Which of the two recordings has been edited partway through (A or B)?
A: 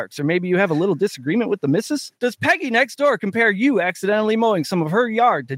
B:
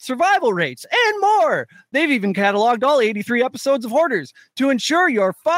A